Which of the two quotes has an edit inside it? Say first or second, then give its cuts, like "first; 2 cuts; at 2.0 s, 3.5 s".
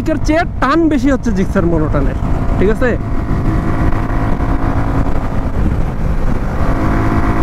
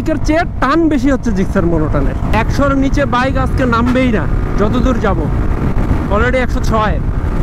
second; 1 cut; at 2.3 s